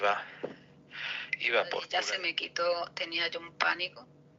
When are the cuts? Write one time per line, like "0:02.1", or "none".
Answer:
0:01.9

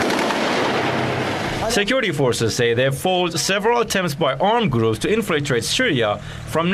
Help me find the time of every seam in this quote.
0:01.4

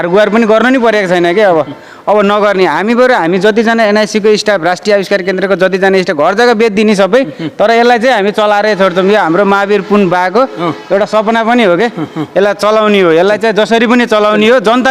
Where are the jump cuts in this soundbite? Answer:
none

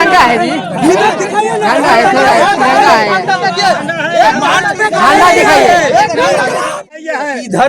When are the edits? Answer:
0:06.8

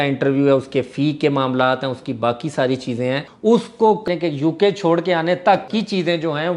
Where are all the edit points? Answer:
0:03.2
0:04.0
0:05.7

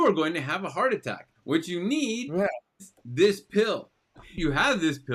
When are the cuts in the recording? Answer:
none

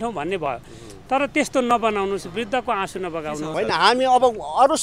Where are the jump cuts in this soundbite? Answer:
0:03.5

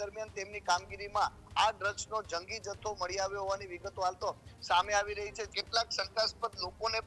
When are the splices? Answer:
0:05.5

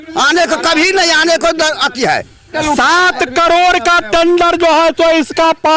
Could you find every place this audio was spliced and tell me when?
0:02.6

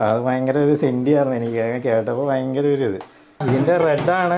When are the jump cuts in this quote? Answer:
0:03.4

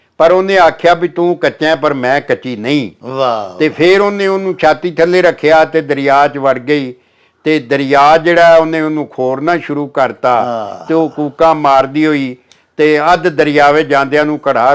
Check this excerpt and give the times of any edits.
none

